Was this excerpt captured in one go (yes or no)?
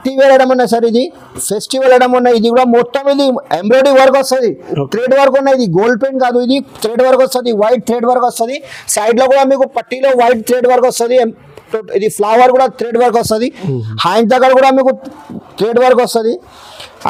yes